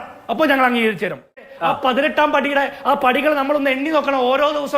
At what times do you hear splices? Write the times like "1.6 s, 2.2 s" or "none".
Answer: 1.5 s